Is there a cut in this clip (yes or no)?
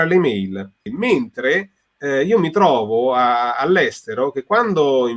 yes